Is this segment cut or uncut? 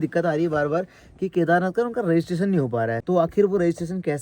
cut